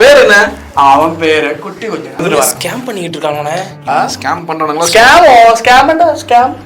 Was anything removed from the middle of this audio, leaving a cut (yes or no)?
yes